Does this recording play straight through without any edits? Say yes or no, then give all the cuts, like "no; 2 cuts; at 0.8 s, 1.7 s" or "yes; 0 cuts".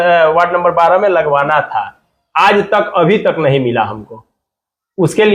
yes; 0 cuts